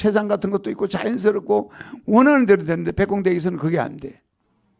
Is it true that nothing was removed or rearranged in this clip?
yes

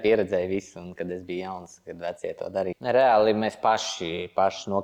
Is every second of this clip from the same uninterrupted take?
no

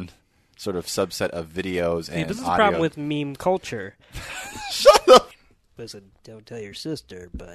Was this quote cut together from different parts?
yes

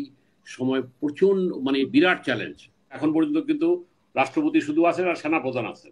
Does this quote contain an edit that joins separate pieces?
yes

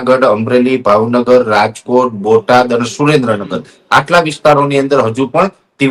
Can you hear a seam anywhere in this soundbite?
no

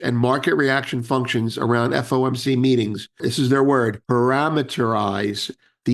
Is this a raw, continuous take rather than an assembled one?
no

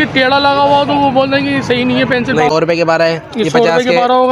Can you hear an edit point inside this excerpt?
yes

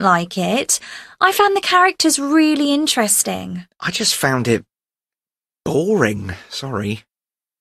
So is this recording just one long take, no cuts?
yes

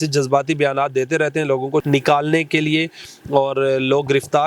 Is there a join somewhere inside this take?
yes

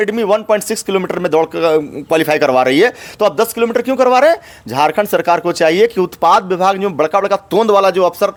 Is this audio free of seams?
yes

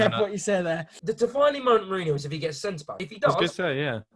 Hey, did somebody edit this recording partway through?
yes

